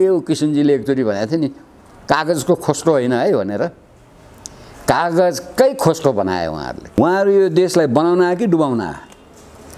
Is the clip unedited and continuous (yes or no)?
no